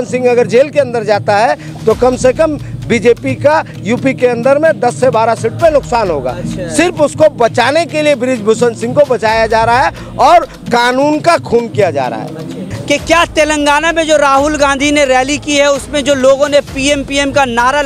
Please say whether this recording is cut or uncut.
cut